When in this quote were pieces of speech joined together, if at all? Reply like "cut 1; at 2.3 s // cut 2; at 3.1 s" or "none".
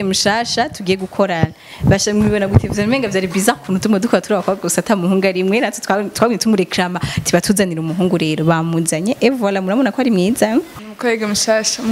cut 1; at 10.8 s